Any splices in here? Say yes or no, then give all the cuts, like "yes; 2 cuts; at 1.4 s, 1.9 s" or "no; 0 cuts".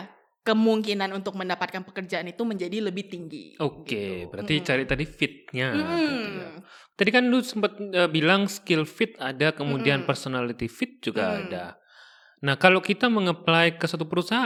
no; 0 cuts